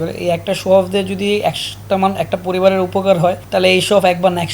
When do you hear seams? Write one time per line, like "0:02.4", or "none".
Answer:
0:03.4

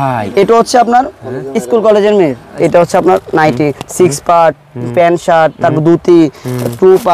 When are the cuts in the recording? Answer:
0:02.4

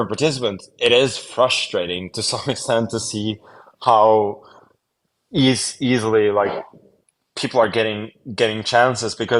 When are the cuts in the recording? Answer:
none

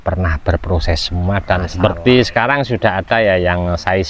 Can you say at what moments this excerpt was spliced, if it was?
0:01.7

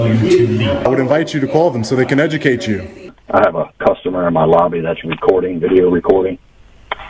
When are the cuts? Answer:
0:00.8
0:03.1

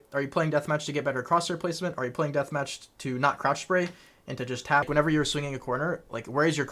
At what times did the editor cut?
0:04.9

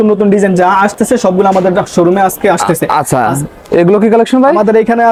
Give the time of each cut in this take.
none

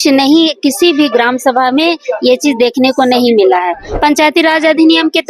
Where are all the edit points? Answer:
0:03.9

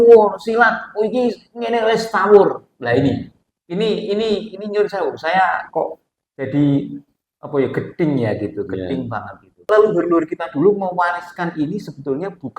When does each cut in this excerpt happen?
0:09.6

